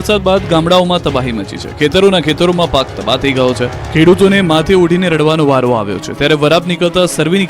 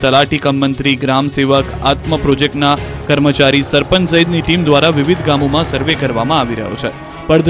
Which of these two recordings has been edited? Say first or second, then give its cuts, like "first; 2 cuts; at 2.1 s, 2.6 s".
first; 1 cut; at 4.0 s